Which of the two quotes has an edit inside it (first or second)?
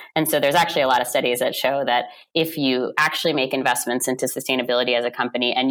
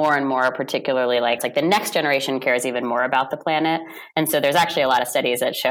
second